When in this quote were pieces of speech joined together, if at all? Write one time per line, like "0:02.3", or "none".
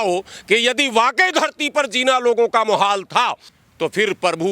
0:03.5